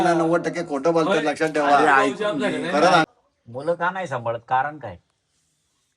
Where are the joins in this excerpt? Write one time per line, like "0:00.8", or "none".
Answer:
0:03.1